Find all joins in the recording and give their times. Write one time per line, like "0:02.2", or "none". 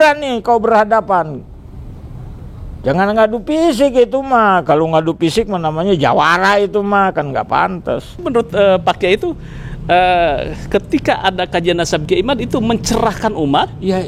0:08.3